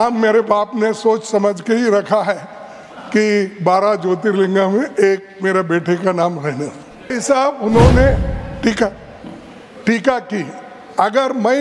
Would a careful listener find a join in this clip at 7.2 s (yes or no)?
yes